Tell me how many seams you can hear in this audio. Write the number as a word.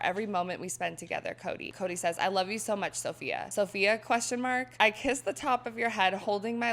three